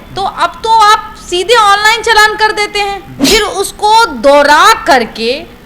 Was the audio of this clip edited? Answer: yes; 1 cut; at 3.1 s

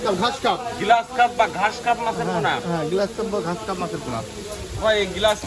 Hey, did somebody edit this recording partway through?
no; 0 cuts

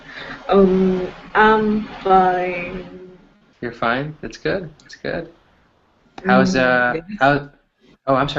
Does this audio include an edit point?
yes; 1 cut; at 6.5 s

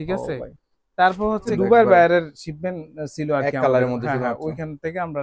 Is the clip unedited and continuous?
no; 1 cut; at 1.5 s

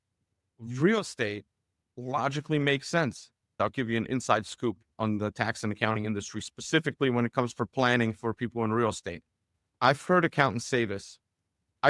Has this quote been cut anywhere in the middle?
yes; 1 cut; at 3.5 s

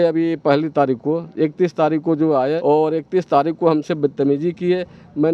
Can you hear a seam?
yes; 1 cut; at 2.6 s

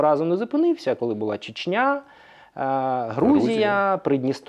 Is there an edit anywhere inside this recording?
no; 0 cuts

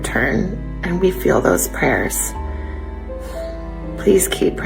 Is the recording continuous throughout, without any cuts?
no; 2 cuts; at 2.3 s, 3.7 s

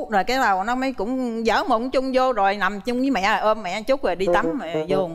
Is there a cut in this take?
no; 0 cuts

